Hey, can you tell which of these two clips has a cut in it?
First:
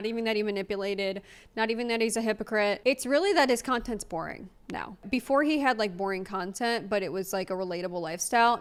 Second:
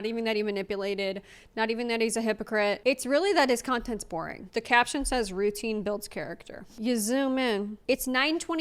second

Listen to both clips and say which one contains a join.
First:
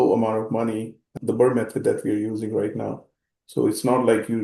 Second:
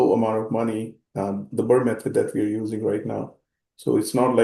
first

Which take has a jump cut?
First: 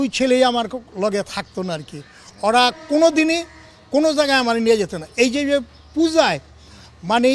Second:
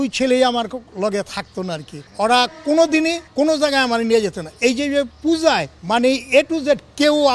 second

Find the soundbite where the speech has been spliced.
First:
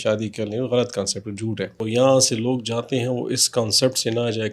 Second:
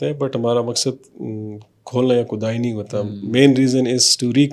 first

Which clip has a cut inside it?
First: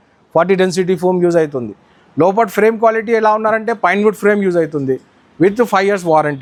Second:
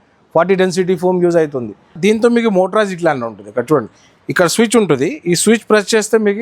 second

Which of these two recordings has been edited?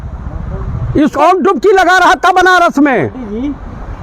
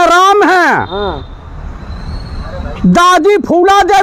first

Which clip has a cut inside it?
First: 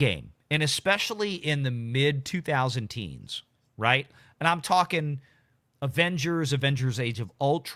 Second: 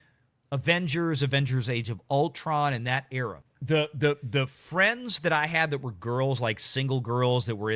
second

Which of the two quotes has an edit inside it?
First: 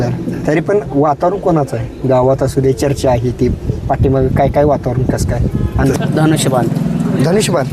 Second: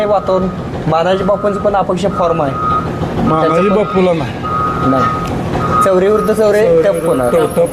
first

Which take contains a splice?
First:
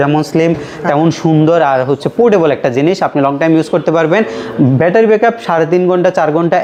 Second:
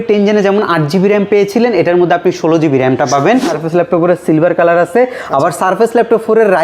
second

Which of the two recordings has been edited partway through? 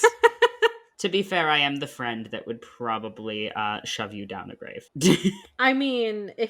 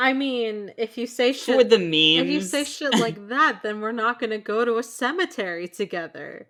first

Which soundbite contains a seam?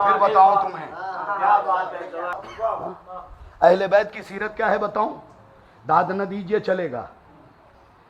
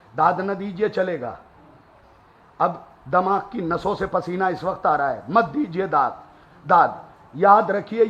first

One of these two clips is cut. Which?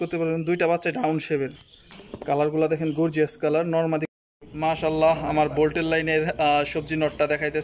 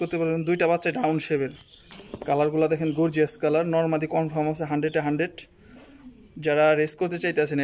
first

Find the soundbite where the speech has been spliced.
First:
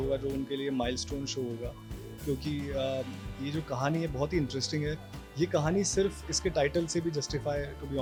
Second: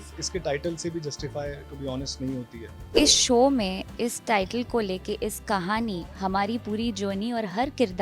second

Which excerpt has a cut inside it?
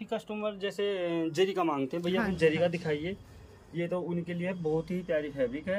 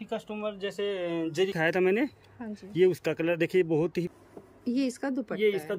second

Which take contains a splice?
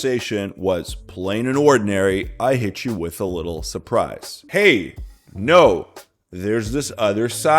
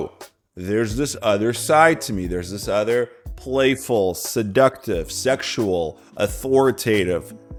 first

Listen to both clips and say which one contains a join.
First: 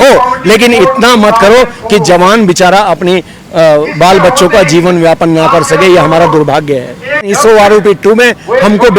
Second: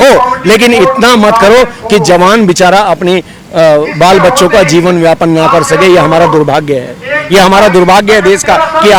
first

